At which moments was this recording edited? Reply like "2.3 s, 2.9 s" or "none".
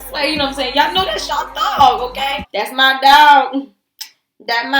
2.5 s